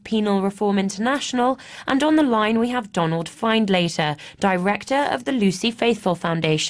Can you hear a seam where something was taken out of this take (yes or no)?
no